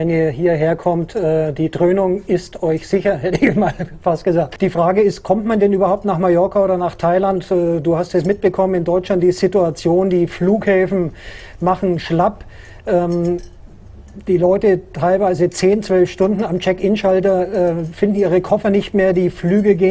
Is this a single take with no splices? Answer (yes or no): no